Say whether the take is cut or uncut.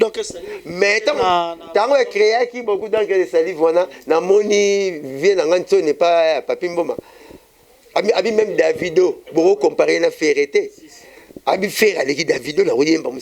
uncut